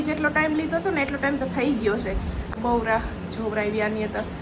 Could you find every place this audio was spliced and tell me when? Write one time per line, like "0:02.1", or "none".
0:02.5